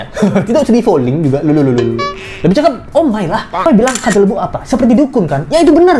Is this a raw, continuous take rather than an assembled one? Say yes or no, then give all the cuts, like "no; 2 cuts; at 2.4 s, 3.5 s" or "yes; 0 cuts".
no; 1 cut; at 3.6 s